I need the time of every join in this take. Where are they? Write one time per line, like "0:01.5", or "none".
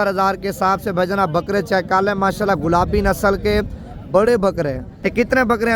0:04.9